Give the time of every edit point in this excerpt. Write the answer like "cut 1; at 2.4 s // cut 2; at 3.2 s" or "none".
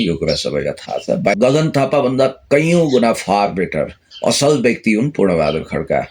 cut 1; at 1.3 s